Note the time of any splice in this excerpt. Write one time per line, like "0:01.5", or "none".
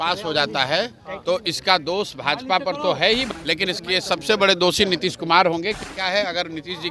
0:03.2
0:05.8